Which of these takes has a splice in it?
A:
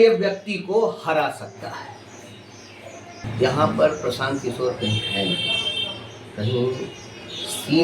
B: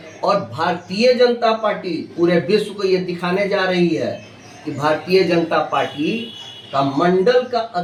A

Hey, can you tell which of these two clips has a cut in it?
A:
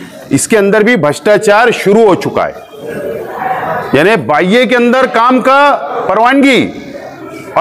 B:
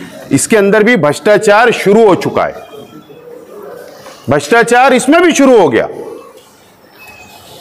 A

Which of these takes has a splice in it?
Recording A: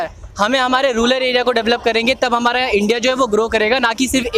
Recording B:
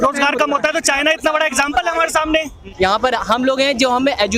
B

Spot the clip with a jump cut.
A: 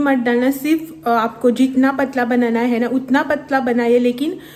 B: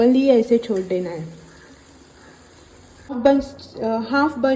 B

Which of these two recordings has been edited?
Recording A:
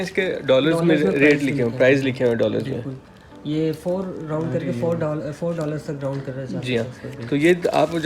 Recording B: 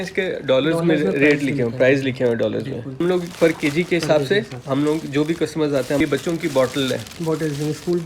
B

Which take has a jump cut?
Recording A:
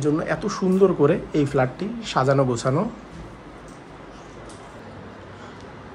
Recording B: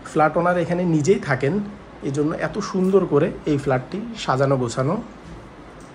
A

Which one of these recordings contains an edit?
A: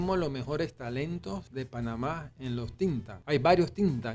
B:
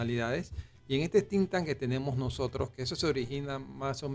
A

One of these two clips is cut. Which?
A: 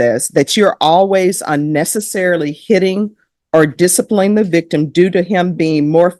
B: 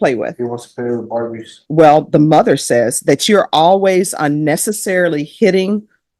B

